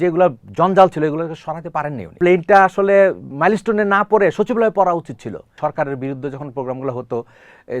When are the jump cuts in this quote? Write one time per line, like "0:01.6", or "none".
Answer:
0:02.0
0:05.4